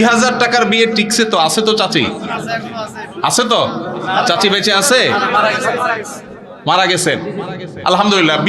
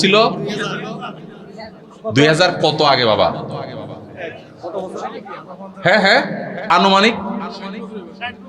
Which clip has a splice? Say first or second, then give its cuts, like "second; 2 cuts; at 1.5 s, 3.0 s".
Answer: second; 1 cut; at 6.7 s